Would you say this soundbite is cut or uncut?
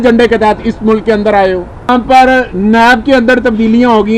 cut